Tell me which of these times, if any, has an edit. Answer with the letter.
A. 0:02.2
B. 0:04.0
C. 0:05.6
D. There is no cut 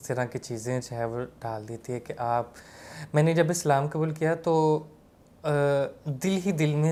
D